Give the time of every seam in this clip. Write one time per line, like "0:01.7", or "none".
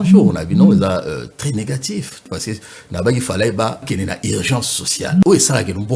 0:02.3
0:03.8
0:05.2